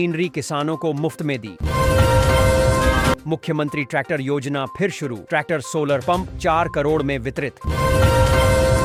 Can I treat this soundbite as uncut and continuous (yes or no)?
yes